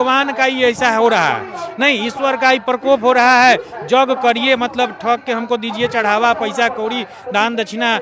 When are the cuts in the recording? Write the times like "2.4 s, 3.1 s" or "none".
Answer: none